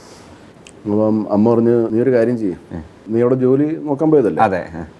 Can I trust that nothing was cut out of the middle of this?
no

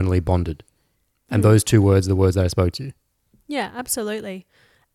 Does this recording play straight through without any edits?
yes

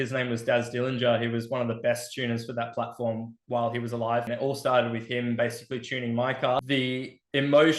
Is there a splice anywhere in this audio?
yes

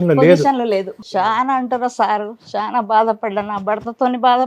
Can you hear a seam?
yes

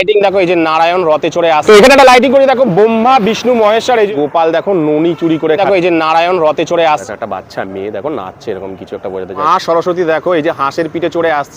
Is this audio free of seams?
no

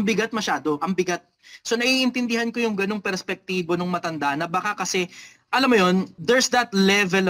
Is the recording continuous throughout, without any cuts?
no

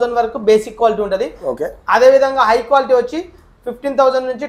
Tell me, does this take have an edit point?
no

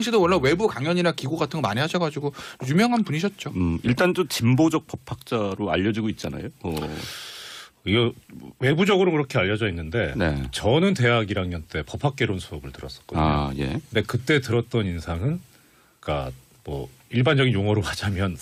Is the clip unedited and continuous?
yes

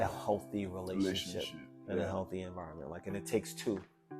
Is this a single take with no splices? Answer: yes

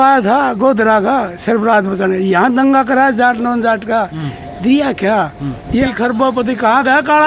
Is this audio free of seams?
no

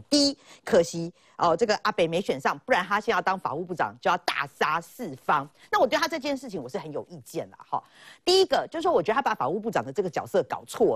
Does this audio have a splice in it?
no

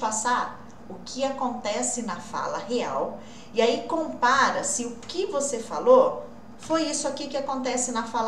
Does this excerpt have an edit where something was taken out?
no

